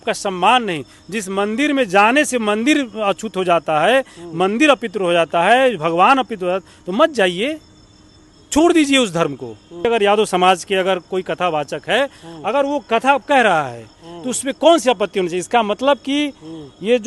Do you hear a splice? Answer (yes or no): yes